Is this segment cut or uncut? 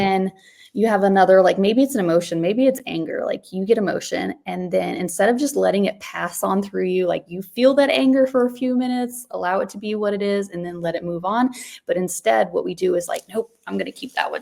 uncut